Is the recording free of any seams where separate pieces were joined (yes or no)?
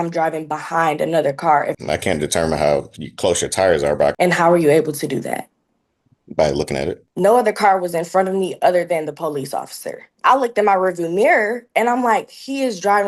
no